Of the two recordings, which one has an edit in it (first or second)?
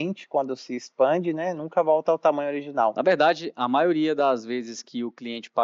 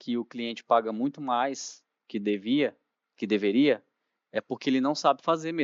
first